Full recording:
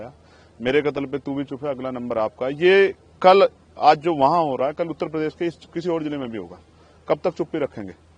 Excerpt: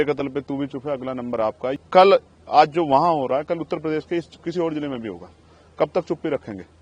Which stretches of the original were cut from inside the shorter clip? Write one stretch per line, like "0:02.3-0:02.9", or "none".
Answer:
0:02.5-0:03.0